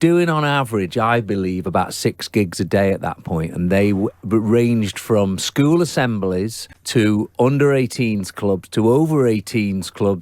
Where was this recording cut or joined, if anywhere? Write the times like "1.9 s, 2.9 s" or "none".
none